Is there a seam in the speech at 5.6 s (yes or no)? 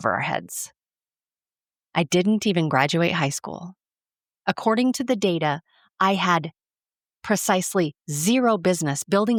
no